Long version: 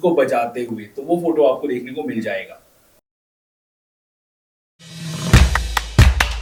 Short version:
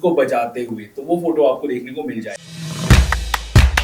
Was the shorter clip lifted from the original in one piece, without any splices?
no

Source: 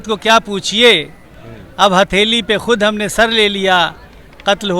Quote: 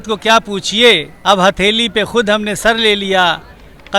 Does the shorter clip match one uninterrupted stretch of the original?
no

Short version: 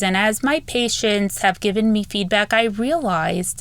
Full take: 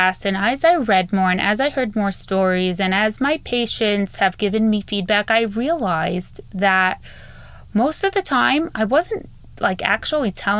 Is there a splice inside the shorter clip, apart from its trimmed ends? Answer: no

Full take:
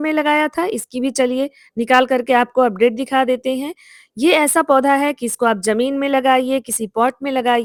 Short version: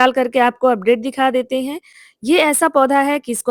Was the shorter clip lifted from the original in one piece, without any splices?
yes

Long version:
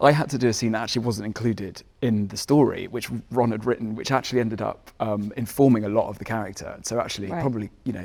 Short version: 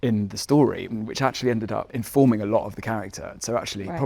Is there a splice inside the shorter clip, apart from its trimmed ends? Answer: yes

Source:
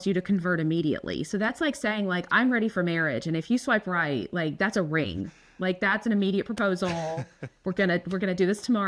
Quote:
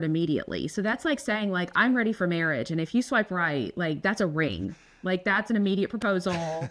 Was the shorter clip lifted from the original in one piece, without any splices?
yes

